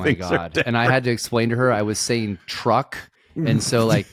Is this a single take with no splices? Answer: yes; 0 cuts

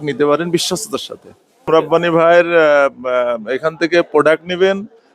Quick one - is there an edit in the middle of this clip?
yes; 1 cut; at 1.7 s

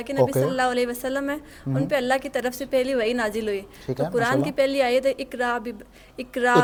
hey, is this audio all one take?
yes; 0 cuts

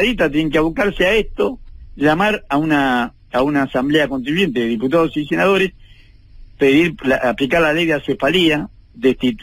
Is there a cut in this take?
no; 0 cuts

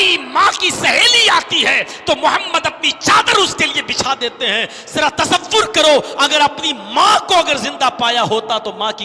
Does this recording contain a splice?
no; 0 cuts

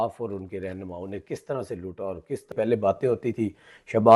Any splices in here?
yes; 1 cut; at 2.5 s

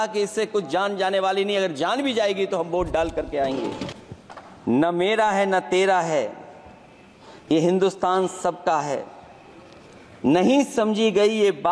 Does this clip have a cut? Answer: yes; 1 cut; at 4.0 s

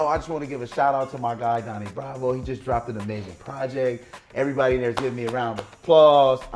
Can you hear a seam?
no; 0 cuts

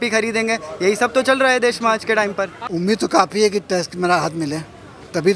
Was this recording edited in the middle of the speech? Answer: yes; 1 cut; at 2.6 s

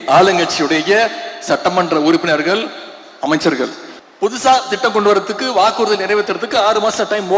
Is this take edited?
yes; 1 cut; at 3.9 s

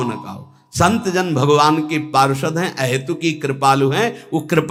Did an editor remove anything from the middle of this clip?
no; 0 cuts

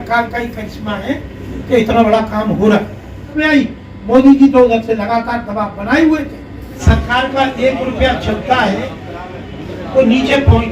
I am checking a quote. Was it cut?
yes; 2 cuts; at 3.3 s, 6.8 s

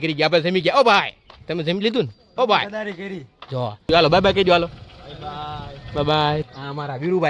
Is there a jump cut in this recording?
yes; 2 cuts; at 3.9 s, 6.5 s

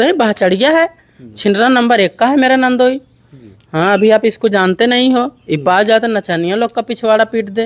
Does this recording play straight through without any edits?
yes; 0 cuts

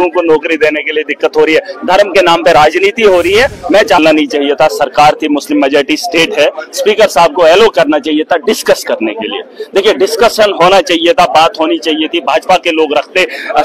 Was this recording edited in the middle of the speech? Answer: yes; 1 cut; at 4.0 s

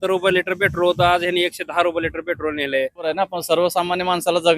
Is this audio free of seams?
no; 1 cut; at 3.1 s

